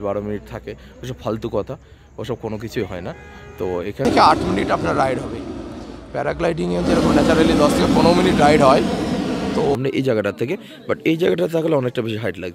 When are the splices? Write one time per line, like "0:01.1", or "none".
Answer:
0:04.0
0:09.8

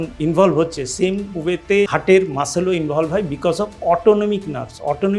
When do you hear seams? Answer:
0:01.9

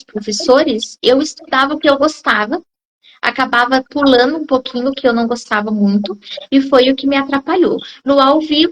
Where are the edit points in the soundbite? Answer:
none

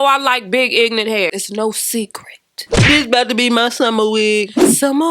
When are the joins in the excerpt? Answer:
0:01.3
0:02.9

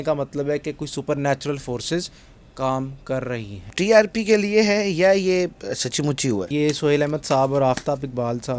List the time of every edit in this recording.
0:03.7
0:06.5

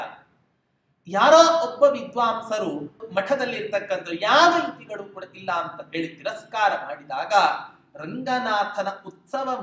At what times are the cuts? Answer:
0:03.0

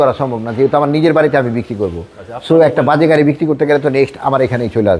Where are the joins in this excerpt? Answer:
none

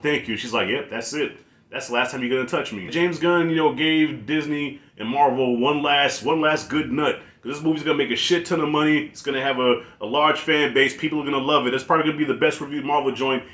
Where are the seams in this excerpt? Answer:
0:02.9

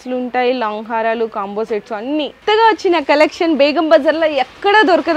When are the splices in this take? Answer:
0:02.4

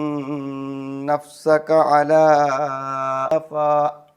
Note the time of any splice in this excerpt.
0:03.3

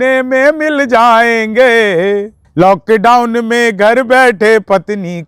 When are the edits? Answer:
0:02.4

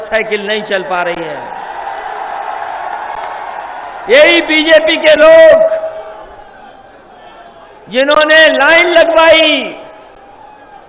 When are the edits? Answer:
none

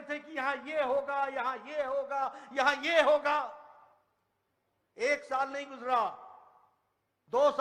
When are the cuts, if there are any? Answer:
none

